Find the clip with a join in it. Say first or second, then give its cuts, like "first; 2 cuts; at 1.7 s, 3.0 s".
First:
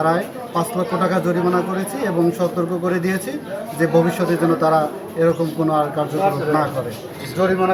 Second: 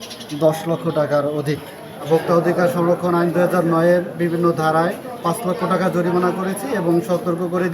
second; 1 cut; at 1.9 s